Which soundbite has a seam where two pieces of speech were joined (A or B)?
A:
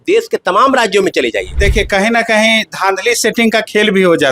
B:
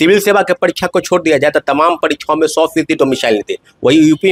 A